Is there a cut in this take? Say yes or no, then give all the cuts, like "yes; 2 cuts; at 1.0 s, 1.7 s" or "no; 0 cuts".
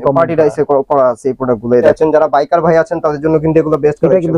yes; 1 cut; at 1.8 s